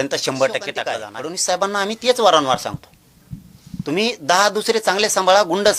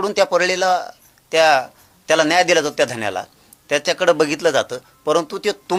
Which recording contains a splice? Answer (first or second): first